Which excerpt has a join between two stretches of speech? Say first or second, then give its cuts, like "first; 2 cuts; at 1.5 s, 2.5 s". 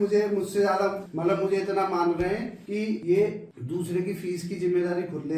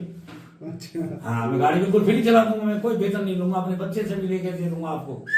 first; 3 cuts; at 1.0 s, 2.8 s, 3.5 s